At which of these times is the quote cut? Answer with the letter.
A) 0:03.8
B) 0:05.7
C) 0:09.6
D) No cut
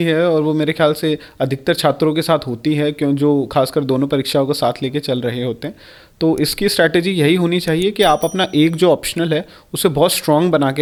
D